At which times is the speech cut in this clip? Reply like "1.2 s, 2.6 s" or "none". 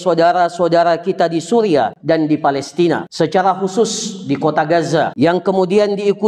2.0 s, 3.1 s, 5.1 s